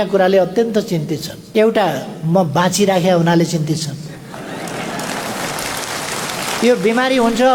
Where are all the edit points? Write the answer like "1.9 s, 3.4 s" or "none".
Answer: none